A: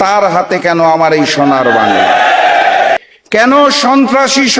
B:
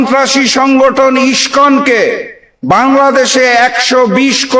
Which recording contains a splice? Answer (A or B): A